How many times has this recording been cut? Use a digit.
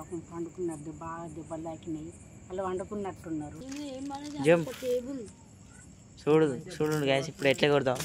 1